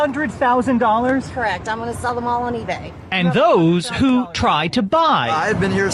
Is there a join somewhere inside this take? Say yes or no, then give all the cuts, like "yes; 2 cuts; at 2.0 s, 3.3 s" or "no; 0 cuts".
no; 0 cuts